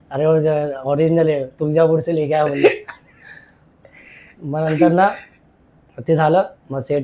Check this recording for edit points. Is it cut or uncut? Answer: uncut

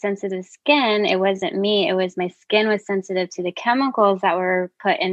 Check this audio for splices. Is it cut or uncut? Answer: uncut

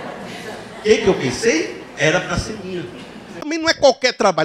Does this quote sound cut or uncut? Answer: cut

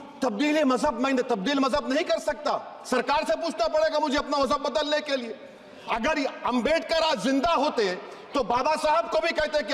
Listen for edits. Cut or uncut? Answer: uncut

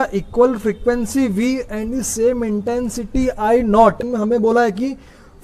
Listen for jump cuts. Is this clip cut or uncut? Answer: cut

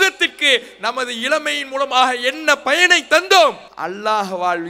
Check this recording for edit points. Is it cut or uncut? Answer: cut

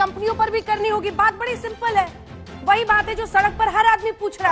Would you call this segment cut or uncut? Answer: uncut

